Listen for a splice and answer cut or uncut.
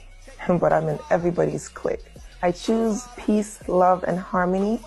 uncut